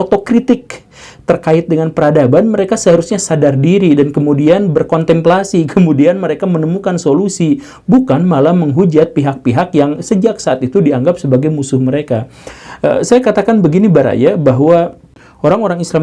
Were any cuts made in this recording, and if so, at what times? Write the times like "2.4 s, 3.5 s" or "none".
none

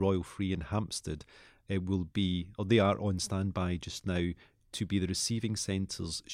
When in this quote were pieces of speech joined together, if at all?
none

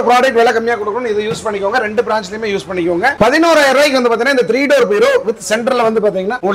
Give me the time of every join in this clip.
none

